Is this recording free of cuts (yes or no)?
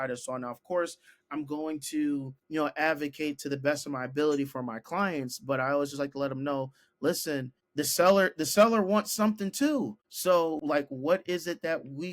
no